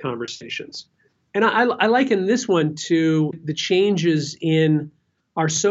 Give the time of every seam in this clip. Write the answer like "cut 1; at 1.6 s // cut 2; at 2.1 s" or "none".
cut 1; at 3.4 s